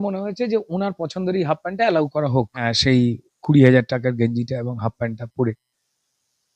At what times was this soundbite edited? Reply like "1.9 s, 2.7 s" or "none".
2.6 s